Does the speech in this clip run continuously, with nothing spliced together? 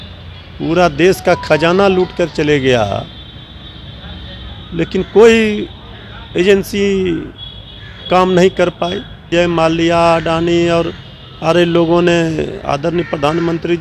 no; 1 cut; at 9.2 s

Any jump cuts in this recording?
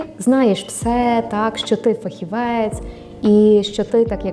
no; 0 cuts

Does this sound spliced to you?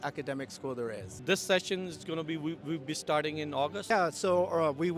yes; 2 cuts; at 1.1 s, 3.9 s

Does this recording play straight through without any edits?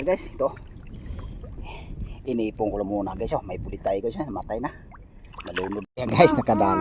no; 1 cut; at 5.8 s

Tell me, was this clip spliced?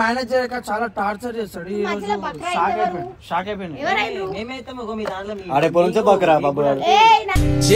no; 0 cuts

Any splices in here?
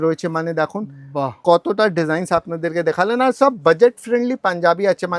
no; 0 cuts

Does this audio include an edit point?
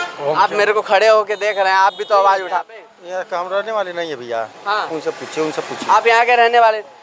yes; 1 cut; at 2.6 s

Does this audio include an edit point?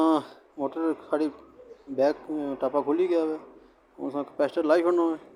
no; 0 cuts

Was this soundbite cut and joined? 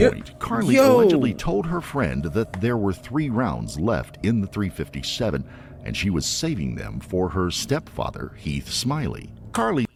no; 0 cuts

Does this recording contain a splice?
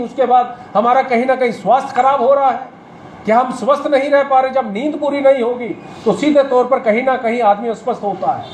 no; 0 cuts

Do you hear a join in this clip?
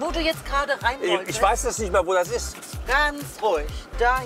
no; 0 cuts

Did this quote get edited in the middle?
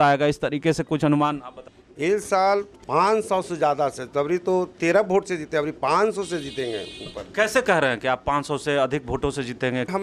no; 0 cuts

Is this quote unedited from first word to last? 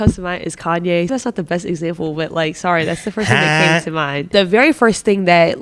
no; 2 cuts; at 1.1 s, 4.2 s

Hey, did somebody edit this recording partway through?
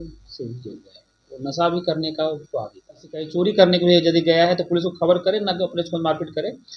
yes; 1 cut; at 3.3 s

